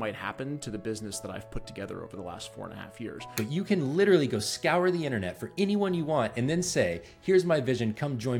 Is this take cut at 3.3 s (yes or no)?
yes